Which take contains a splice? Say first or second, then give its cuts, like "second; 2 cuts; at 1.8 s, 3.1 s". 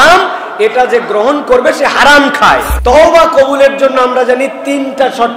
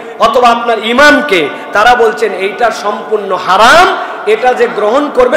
first; 1 cut; at 2.7 s